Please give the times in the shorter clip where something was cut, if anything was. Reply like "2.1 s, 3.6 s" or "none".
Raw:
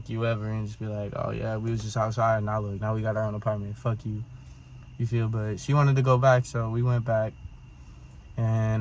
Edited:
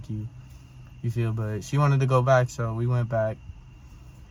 none